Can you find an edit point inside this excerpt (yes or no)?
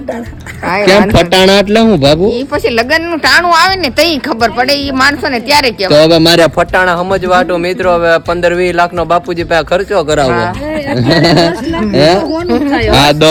no